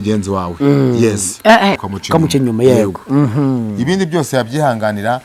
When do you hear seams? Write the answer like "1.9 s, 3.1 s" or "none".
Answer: 1.8 s